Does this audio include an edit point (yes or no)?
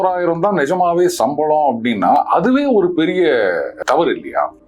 yes